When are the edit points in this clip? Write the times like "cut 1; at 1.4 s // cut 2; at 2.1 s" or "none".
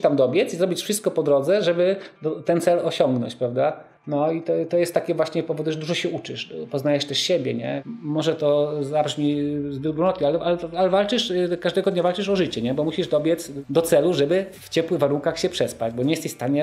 cut 1; at 3.9 s // cut 2; at 7.8 s // cut 3; at 13.5 s // cut 4; at 14.6 s